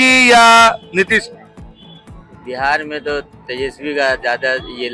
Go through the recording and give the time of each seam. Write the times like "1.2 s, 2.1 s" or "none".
none